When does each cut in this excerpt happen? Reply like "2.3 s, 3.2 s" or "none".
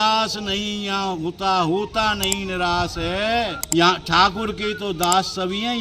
3.6 s